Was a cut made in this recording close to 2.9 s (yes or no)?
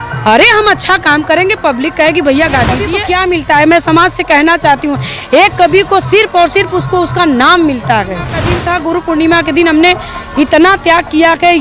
yes